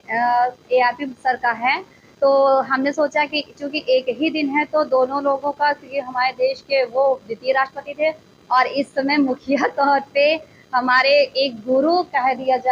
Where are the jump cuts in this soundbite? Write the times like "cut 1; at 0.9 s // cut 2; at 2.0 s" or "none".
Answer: none